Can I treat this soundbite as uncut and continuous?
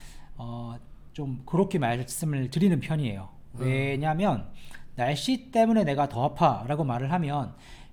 yes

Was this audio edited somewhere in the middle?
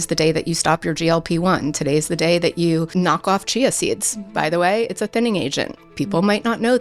yes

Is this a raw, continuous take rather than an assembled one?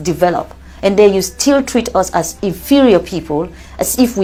yes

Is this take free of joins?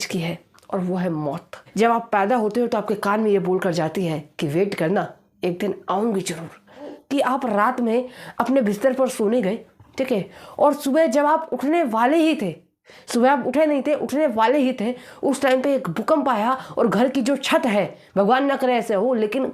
no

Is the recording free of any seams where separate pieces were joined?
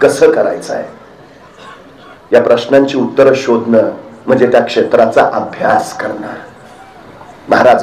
yes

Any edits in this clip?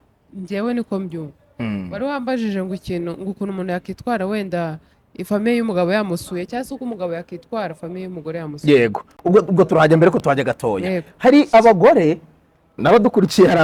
no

